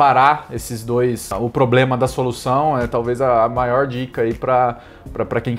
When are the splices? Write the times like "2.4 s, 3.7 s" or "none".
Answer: 1.3 s